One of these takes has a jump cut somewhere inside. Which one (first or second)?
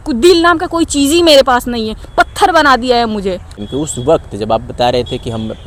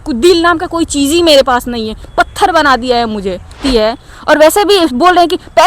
second